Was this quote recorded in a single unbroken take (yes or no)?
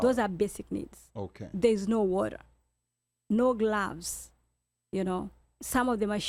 yes